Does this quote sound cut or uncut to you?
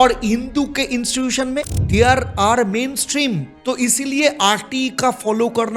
cut